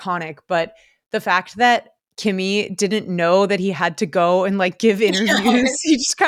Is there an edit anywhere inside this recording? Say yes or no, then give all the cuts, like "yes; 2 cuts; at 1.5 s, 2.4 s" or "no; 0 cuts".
no; 0 cuts